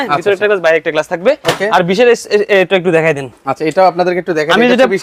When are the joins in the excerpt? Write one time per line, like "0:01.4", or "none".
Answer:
none